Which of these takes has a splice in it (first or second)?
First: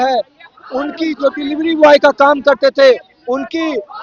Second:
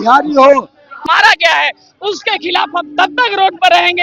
second